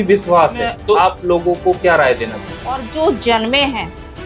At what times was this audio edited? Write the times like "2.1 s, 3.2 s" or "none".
1.0 s, 2.9 s